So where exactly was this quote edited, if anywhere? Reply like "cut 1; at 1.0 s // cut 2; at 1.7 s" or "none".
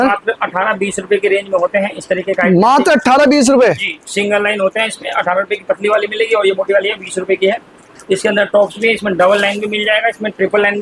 none